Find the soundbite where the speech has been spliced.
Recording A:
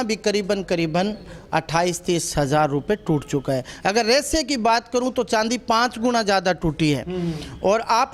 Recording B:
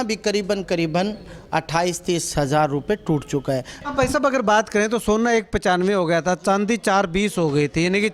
B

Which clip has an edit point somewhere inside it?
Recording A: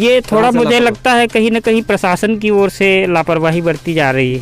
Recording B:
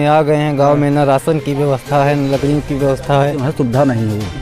B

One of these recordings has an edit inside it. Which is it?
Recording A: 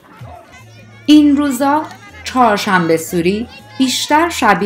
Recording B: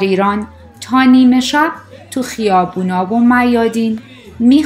A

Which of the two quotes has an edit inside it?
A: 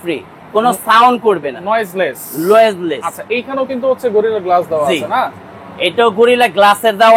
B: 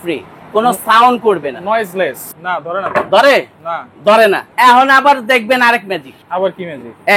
B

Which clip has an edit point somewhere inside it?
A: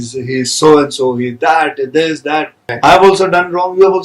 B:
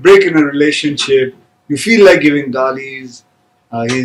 A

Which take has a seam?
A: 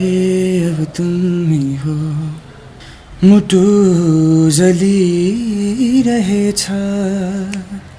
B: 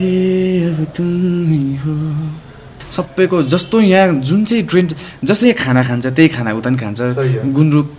B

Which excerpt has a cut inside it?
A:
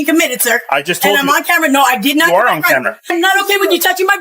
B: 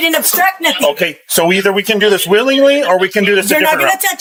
A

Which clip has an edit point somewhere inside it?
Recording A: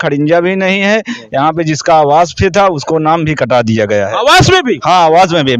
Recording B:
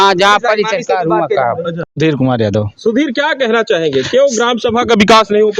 B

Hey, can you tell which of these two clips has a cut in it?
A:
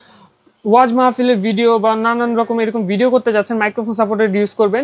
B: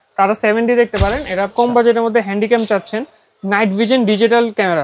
B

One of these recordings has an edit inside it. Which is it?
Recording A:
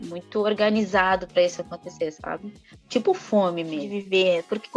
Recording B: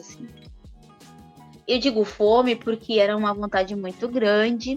A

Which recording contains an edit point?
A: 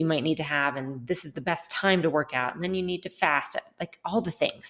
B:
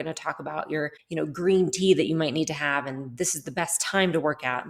B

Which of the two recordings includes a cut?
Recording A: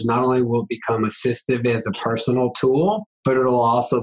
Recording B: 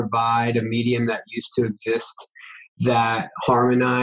A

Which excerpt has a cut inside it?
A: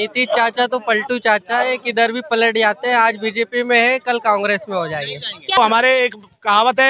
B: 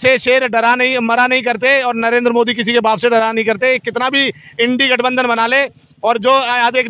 A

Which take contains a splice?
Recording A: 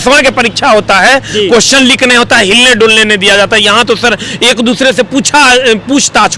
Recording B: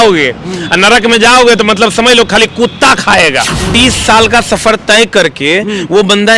B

